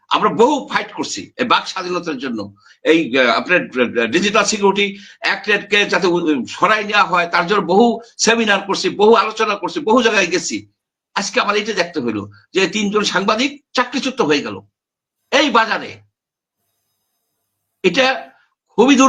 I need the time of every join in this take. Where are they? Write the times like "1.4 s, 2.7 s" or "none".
none